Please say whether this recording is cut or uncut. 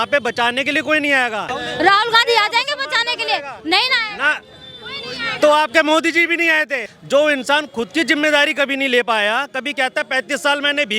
cut